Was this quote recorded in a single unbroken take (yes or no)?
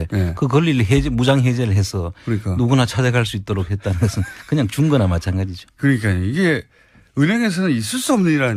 yes